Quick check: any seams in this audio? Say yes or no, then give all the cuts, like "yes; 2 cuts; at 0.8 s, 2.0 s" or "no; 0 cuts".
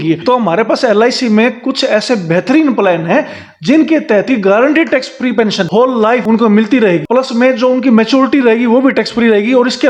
no; 0 cuts